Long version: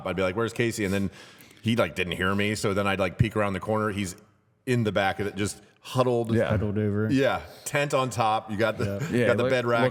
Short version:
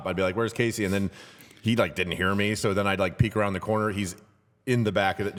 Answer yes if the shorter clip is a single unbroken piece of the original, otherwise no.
yes